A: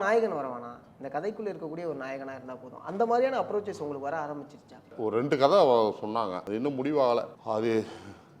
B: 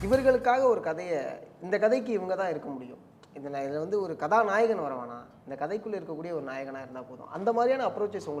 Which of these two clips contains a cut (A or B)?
A